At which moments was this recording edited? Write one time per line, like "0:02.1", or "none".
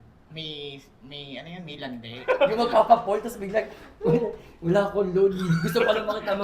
0:02.1